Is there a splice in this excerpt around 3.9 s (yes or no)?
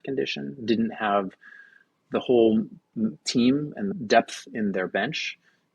yes